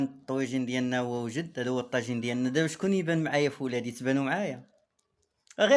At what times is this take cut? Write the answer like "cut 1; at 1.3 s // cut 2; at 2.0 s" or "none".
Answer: none